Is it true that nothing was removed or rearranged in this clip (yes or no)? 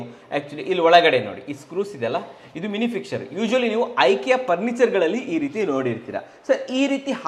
yes